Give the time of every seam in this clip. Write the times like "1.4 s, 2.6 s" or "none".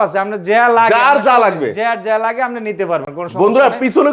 none